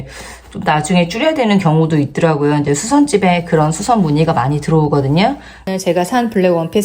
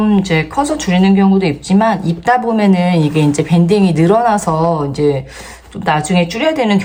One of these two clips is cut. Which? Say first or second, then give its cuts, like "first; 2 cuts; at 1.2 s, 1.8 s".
first; 1 cut; at 5.5 s